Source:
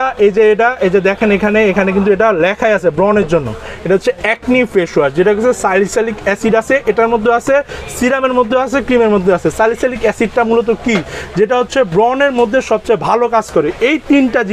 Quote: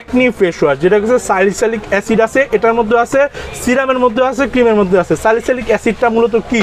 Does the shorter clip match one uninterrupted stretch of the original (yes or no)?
yes